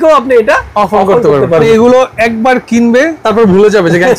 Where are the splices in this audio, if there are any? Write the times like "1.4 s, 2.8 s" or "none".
1.6 s, 3.2 s